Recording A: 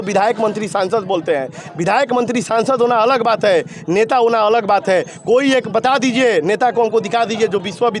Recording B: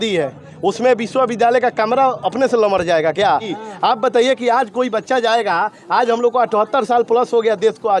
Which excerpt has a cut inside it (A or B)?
B